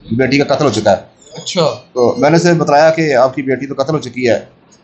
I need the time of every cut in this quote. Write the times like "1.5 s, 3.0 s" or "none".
none